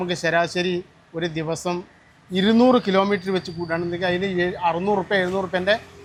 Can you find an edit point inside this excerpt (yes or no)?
no